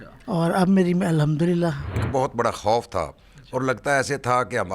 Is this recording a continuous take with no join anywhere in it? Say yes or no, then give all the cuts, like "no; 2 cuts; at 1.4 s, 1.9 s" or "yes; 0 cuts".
no; 1 cut; at 2.0 s